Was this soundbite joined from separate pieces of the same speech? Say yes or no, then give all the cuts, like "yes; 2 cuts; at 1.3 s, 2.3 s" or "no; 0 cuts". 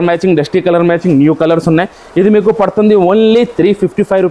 no; 0 cuts